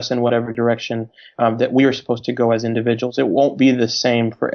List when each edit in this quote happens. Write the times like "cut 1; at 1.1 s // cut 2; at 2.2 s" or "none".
none